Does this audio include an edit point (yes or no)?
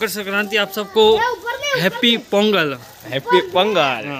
no